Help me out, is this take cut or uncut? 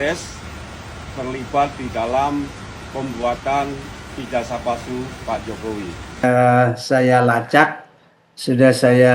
cut